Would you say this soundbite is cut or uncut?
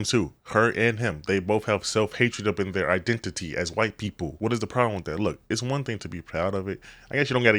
cut